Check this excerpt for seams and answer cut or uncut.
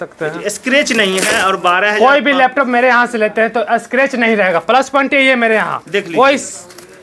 uncut